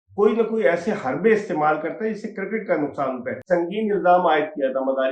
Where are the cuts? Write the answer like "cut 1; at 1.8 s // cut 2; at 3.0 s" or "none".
cut 1; at 3.4 s

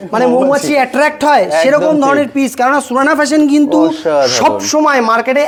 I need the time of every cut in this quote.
none

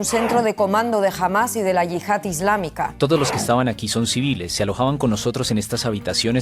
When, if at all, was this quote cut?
cut 1; at 2.9 s

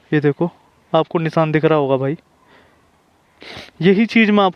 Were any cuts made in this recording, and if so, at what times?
none

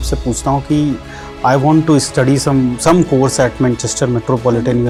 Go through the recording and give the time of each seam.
none

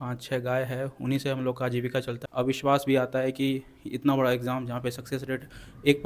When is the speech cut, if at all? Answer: cut 1; at 2.2 s

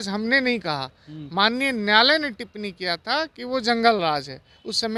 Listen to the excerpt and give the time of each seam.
none

